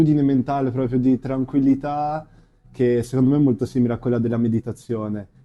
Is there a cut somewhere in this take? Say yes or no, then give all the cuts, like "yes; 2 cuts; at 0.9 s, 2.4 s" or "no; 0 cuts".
no; 0 cuts